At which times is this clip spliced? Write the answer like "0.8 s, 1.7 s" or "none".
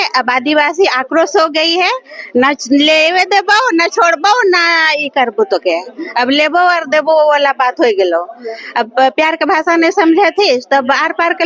none